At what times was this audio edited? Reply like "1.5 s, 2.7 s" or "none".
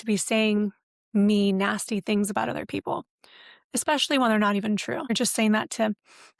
5.1 s